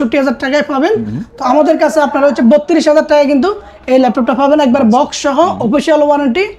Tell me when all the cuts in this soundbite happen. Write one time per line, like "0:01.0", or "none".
none